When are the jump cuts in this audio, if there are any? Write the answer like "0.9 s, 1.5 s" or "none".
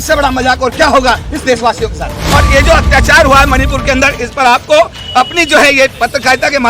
2.2 s